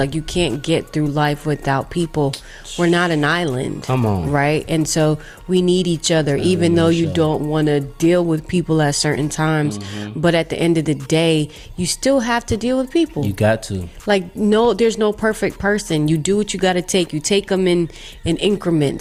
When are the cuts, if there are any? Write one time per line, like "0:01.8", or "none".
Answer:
none